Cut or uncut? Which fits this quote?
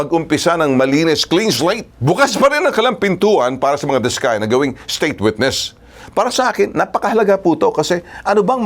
cut